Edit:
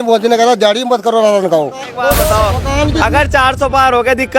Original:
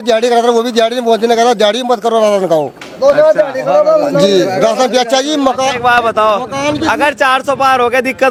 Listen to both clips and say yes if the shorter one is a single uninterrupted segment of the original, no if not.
no